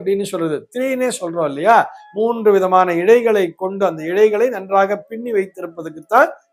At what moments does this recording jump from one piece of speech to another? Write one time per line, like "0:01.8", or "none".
none